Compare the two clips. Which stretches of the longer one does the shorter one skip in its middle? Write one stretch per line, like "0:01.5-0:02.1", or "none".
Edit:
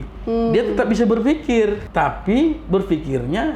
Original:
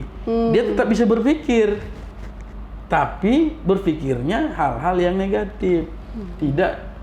0:01.8-0:02.8